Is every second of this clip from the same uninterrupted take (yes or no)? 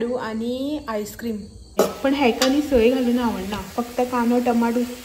no